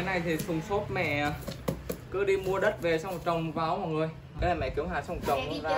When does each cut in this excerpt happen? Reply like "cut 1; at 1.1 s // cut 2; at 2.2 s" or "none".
cut 1; at 4.4 s